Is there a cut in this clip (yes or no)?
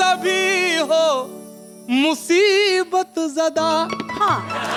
no